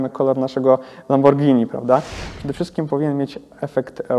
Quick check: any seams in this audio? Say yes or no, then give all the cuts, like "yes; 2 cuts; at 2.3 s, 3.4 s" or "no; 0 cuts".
yes; 1 cut; at 2.2 s